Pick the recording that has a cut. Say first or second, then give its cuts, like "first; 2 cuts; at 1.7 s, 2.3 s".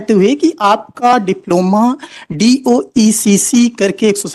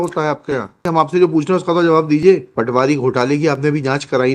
second; 2 cuts; at 0.8 s, 2.5 s